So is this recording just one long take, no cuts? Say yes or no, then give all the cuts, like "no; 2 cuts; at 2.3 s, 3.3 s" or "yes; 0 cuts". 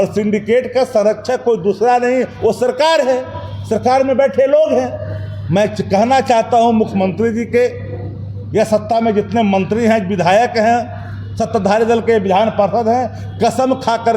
yes; 0 cuts